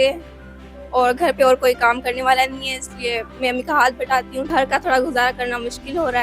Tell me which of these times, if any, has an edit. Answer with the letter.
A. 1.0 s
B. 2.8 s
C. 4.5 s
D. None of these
C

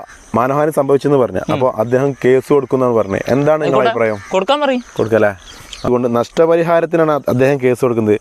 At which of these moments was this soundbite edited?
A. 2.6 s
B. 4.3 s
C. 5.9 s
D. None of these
C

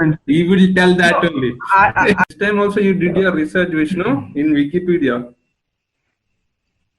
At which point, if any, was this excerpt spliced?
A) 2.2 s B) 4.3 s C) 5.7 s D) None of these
A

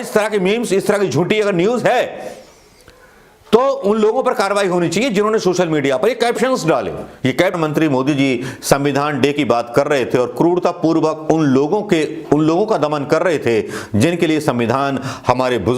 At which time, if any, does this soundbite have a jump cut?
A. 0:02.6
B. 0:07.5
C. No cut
B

